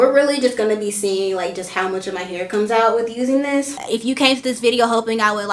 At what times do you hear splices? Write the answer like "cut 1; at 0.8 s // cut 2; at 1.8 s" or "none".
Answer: cut 1; at 3.8 s